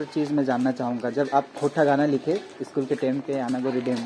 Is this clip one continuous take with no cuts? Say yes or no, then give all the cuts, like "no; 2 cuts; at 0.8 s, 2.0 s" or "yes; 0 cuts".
yes; 0 cuts